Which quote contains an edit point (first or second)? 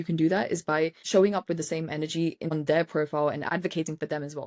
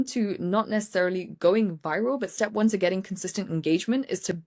first